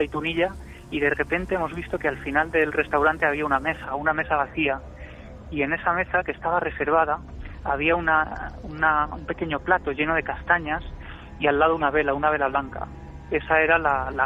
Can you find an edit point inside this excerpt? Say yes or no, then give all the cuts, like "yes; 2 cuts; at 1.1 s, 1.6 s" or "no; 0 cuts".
no; 0 cuts